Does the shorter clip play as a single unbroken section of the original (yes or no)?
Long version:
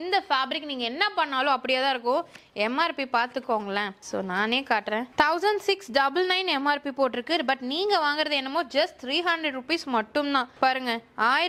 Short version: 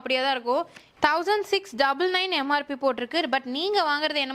no